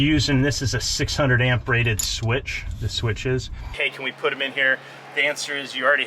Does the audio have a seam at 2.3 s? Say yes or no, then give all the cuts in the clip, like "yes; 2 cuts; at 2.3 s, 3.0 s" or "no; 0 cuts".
no; 1 cut; at 3.6 s